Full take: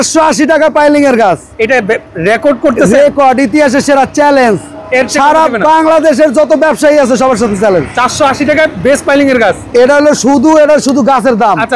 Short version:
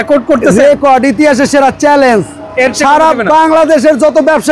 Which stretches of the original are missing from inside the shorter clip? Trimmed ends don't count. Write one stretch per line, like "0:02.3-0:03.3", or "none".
none